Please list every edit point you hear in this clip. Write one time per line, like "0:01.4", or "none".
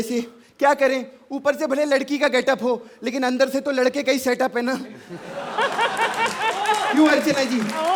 none